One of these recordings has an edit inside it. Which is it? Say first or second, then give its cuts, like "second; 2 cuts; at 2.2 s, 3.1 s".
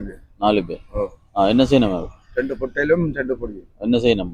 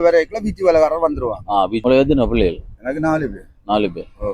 second; 1 cut; at 1.8 s